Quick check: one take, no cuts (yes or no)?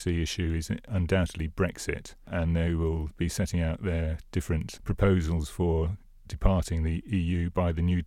no